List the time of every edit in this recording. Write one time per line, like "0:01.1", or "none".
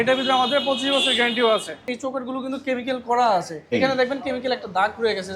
0:01.9
0:03.6